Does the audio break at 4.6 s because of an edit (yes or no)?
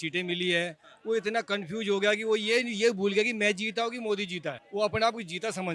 yes